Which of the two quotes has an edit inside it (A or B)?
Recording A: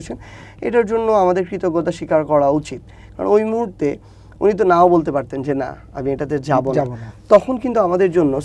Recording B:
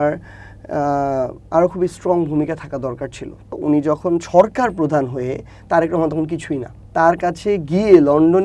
B